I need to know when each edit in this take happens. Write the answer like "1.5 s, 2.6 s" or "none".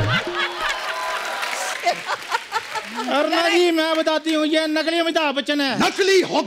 1.7 s